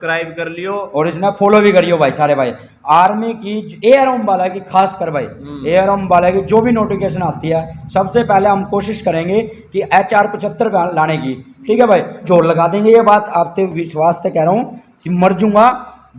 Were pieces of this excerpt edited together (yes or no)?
yes